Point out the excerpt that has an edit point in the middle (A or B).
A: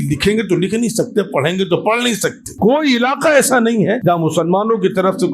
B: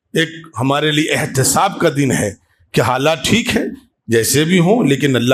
A